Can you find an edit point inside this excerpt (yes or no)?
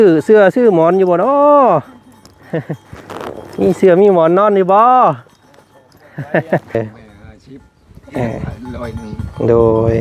yes